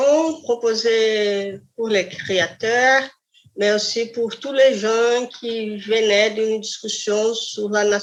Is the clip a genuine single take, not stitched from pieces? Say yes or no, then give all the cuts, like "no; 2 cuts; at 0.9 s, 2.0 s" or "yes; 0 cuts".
yes; 0 cuts